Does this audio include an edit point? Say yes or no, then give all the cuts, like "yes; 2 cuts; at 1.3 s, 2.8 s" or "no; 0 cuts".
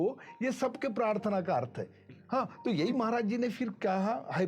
yes; 1 cut; at 2.0 s